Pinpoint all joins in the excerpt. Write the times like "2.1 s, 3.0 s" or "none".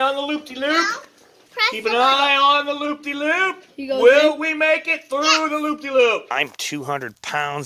6.3 s